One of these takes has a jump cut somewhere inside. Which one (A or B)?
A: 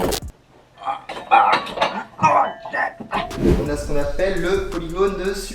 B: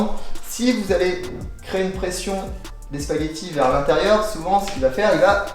A